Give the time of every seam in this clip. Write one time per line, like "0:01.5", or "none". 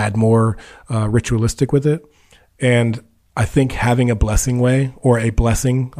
none

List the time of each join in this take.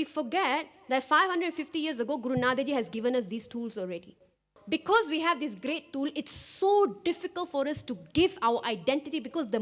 0:04.5

